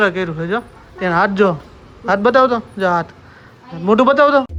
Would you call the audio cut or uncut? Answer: uncut